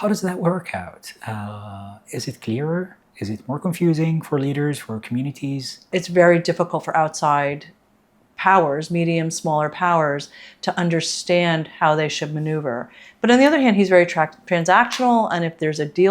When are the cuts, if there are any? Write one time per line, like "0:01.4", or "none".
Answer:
0:05.9